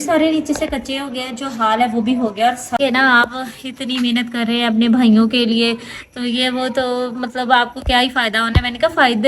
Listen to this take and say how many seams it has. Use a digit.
1